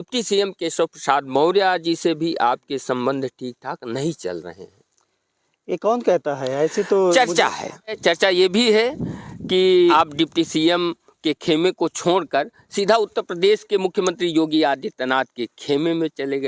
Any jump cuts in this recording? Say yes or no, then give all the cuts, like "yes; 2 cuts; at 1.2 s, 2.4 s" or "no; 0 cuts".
yes; 2 cuts; at 8.0 s, 9.9 s